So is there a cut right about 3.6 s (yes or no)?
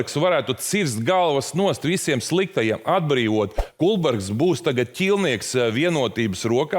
yes